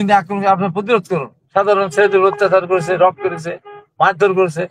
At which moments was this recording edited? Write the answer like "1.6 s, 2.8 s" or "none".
1.4 s